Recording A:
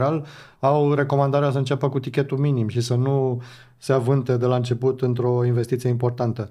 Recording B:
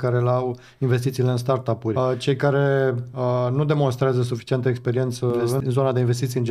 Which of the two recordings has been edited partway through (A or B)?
B